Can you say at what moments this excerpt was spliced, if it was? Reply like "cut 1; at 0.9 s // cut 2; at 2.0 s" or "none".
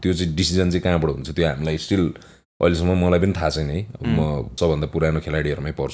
cut 1; at 4.5 s